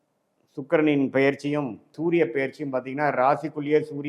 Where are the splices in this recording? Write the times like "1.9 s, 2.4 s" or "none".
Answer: 1.9 s

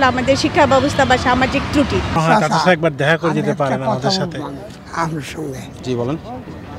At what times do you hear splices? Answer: 2.1 s

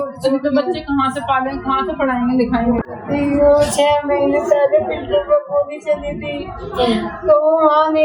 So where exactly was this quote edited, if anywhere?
2.9 s

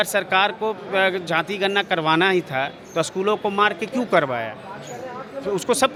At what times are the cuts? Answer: none

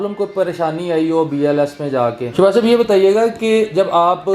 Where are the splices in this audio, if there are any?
2.2 s

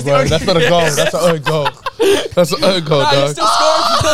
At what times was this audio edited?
none

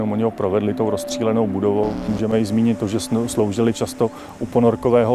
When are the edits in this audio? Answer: 2.1 s

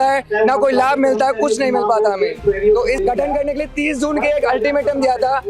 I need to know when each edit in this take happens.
3.0 s

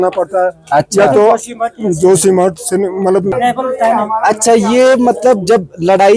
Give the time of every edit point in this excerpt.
3.3 s

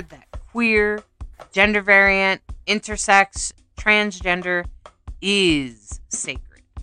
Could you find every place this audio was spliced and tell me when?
none

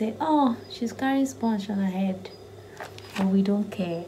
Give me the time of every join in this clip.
none

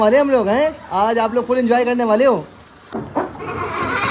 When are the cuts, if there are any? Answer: 2.9 s

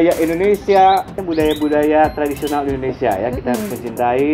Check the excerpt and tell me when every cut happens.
1.2 s

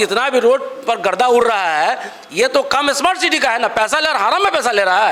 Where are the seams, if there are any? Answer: none

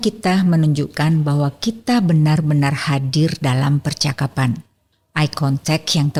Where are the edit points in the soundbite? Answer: none

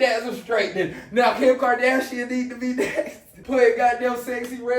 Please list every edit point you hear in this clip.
3.3 s

